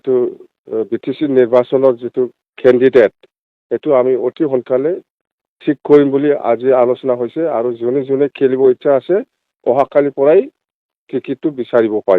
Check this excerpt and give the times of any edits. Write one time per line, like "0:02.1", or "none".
0:02.4